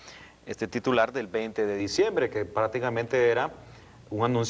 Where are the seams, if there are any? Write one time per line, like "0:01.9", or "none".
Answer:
none

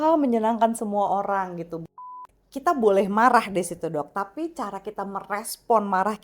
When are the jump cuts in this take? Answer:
0:01.9

